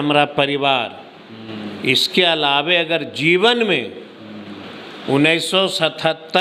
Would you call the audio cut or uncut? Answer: uncut